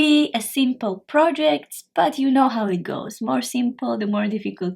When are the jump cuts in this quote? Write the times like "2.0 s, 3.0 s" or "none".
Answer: none